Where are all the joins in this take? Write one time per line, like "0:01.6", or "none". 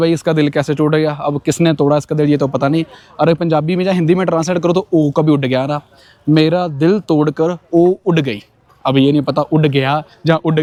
none